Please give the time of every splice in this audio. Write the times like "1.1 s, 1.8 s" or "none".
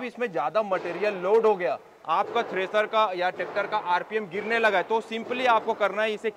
none

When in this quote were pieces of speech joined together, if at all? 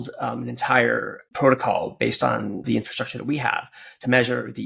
1.2 s, 2.6 s

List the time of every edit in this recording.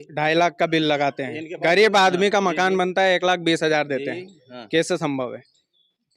none

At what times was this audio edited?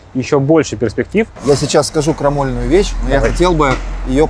1.3 s

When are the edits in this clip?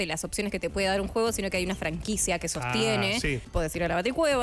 3.4 s

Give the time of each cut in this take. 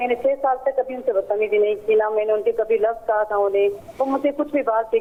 none

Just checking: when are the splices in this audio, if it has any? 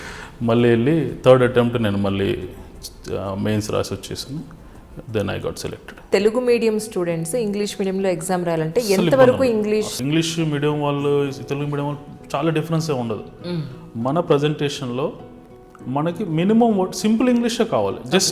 6.1 s, 10.0 s

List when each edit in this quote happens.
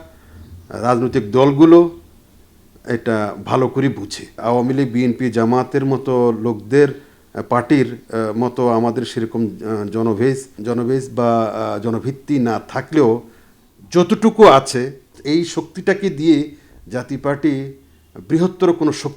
4.4 s, 10.5 s, 15.2 s

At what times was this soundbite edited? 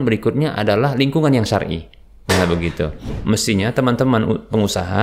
3.2 s

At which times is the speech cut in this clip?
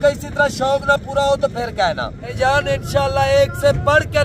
2.3 s

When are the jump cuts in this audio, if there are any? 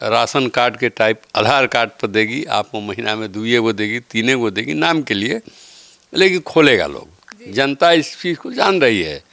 7.1 s

